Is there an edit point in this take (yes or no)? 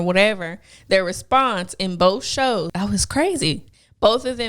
yes